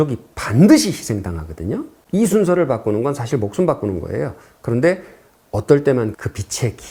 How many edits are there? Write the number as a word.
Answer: zero